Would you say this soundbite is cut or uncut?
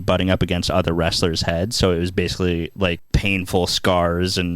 cut